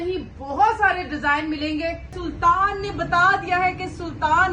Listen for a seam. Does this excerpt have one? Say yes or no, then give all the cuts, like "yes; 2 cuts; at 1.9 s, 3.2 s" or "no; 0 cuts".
yes; 1 cut; at 2.1 s